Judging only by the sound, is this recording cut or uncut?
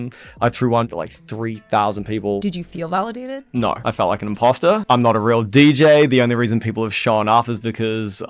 cut